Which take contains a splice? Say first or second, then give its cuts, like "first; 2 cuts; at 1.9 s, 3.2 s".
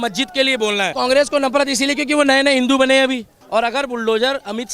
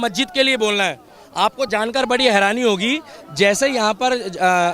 first; 2 cuts; at 0.9 s, 3.4 s